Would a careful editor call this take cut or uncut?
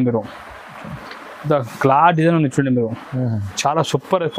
uncut